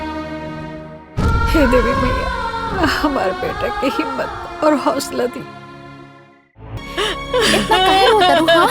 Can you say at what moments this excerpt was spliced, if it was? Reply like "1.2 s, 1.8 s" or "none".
6.8 s